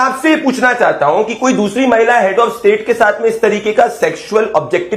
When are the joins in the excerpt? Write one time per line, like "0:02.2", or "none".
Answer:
none